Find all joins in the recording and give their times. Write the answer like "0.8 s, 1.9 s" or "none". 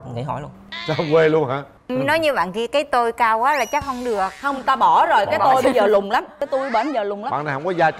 1.7 s